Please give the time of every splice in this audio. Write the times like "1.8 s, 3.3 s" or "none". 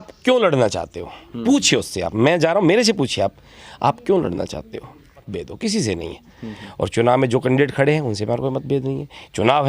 5.3 s